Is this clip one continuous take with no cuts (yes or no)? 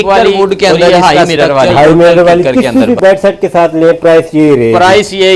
yes